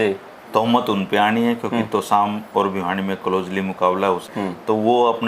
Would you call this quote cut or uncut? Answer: cut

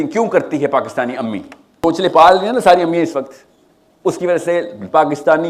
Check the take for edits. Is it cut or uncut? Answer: cut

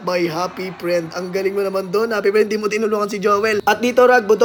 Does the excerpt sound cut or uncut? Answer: uncut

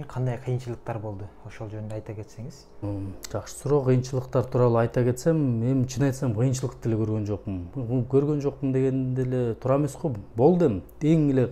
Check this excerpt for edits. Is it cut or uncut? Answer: uncut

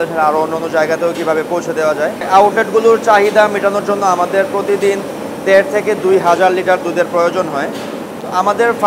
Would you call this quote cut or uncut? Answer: cut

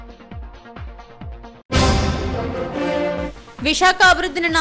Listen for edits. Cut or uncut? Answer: cut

